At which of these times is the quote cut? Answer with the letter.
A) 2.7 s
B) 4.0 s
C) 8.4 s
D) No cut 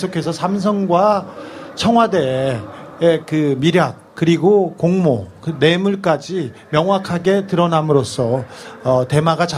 C